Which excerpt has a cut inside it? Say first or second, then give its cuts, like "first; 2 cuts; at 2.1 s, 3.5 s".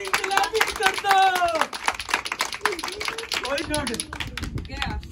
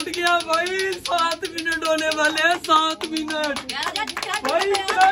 first; 1 cut; at 3.6 s